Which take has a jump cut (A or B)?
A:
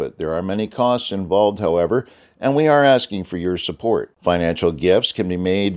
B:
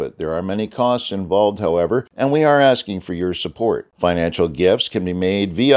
B